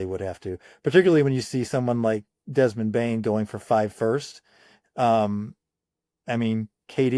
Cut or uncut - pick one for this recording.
uncut